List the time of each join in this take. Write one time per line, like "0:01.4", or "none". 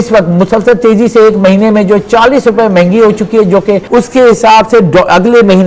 0:03.8

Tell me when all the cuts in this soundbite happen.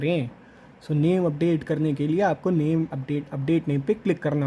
none

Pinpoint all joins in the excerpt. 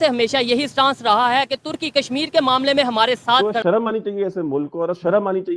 0:03.5

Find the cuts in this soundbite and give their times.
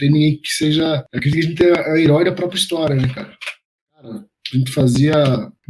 0:04.1

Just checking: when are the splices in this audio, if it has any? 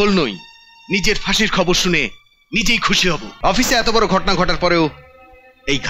0:03.3

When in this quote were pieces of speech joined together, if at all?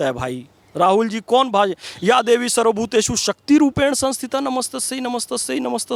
none

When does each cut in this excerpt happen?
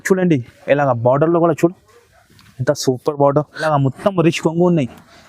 0:03.6

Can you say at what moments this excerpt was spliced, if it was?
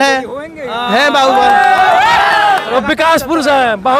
0:02.7

